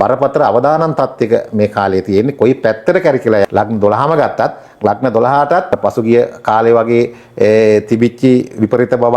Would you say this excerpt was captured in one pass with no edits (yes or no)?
no